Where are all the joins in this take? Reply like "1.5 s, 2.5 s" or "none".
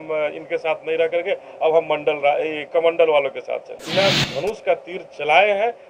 3.8 s